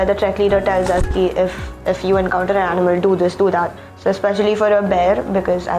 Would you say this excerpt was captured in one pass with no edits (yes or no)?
yes